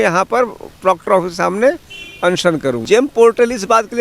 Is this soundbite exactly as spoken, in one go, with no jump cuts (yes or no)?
no